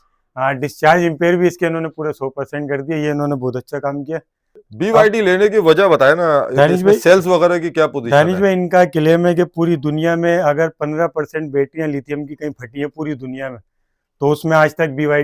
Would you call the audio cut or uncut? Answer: cut